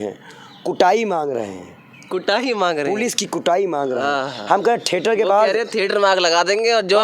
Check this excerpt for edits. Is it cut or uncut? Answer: uncut